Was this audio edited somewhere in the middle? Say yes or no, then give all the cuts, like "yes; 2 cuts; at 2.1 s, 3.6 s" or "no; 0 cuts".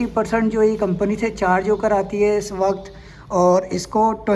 no; 0 cuts